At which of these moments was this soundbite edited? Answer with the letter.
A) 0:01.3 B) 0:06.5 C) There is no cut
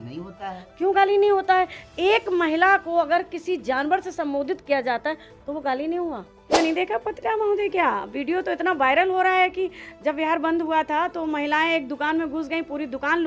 B